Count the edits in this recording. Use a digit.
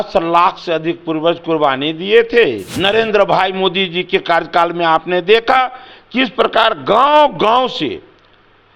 1